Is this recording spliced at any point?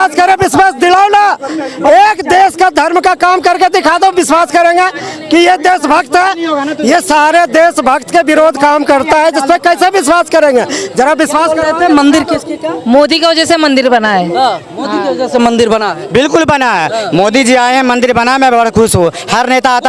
no; 0 cuts

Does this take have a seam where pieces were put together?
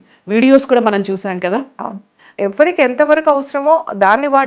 yes; 1 cut; at 2.3 s

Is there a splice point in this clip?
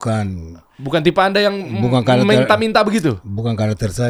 no; 0 cuts

